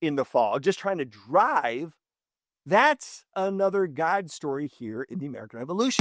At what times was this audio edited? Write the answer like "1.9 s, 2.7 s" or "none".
none